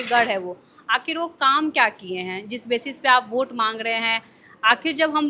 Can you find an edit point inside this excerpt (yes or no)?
no